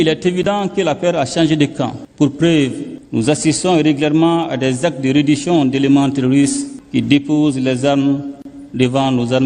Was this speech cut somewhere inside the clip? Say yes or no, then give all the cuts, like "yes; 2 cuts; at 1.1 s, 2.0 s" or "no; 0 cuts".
no; 0 cuts